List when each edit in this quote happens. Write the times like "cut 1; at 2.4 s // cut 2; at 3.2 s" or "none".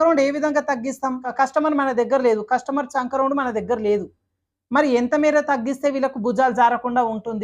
cut 1; at 1.2 s